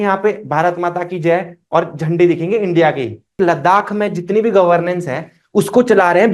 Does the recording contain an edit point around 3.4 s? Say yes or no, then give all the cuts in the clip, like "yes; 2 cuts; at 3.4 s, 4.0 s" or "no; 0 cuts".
yes; 1 cut; at 3.4 s